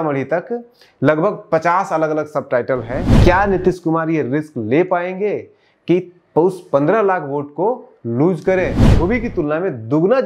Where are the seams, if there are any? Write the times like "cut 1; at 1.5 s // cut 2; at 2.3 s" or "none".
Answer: cut 1; at 3.1 s // cut 2; at 8.9 s

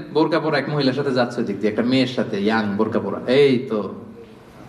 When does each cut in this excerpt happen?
none

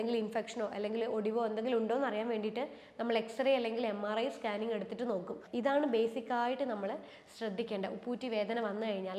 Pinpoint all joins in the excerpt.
cut 1; at 5.4 s

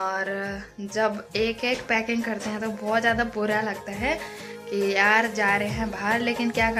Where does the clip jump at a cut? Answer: none

